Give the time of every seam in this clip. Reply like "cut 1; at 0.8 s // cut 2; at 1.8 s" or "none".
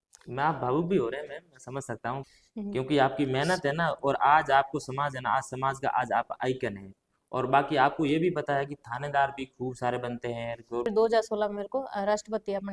cut 1; at 2.2 s // cut 2; at 10.9 s